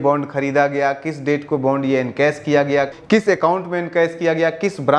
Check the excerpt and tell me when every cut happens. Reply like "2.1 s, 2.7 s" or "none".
none

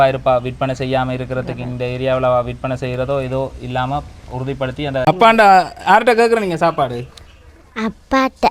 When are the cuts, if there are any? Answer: 5.0 s

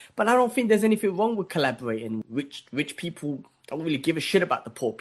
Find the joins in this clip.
2.2 s

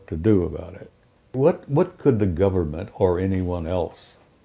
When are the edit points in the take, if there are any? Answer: 1.3 s

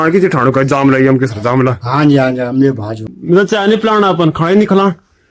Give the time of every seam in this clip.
2.9 s

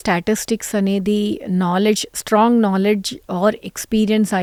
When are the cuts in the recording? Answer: none

